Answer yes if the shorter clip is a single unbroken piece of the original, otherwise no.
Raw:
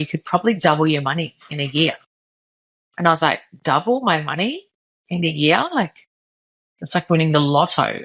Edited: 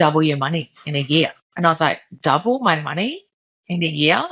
no